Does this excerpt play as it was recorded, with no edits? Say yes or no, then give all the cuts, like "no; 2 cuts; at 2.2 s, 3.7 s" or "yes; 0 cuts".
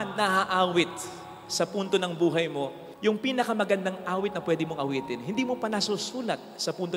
yes; 0 cuts